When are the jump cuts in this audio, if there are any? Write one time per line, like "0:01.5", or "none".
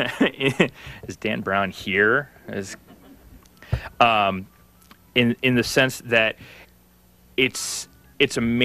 0:01.0